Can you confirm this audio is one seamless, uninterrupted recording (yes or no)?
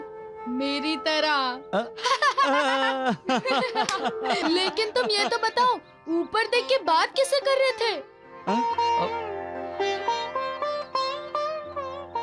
no